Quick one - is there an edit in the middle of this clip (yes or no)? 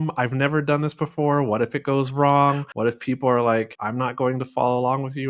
yes